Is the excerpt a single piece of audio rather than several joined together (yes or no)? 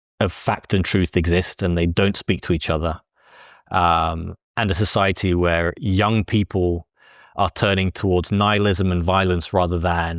yes